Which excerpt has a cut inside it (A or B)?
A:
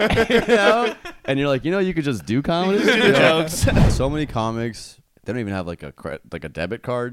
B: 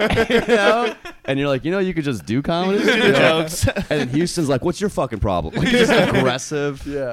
A